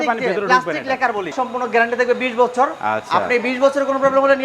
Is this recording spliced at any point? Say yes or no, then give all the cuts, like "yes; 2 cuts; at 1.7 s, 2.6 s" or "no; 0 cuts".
yes; 1 cut; at 1.4 s